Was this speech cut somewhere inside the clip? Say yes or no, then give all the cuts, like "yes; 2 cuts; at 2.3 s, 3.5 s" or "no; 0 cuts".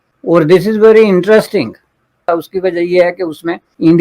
yes; 1 cut; at 2.2 s